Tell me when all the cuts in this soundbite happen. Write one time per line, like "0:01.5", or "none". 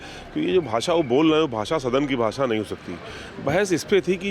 none